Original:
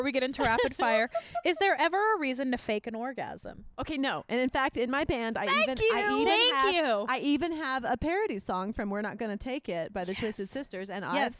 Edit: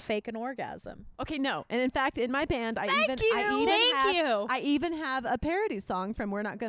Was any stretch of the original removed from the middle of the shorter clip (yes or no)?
no